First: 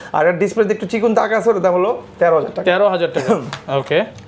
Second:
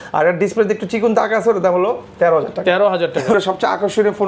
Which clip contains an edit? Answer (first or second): second